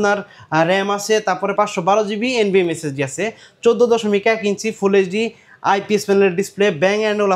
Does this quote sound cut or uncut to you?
uncut